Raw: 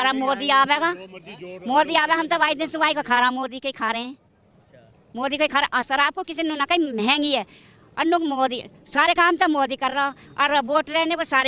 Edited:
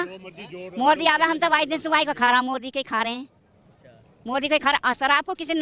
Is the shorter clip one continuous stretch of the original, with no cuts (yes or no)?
yes